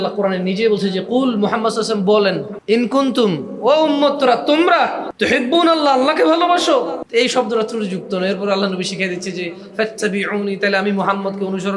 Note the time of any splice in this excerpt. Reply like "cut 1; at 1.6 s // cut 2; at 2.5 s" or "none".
cut 1; at 2.5 s // cut 2; at 5.1 s // cut 3; at 7.0 s